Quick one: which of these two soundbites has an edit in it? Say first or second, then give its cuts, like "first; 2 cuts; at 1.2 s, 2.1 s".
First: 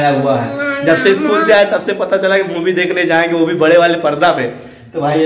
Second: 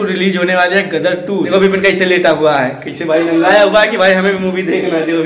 second; 1 cut; at 1.5 s